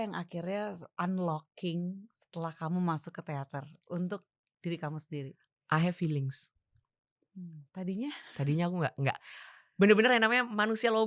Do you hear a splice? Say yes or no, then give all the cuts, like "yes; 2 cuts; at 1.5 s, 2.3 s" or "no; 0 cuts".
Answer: yes; 1 cut; at 0.9 s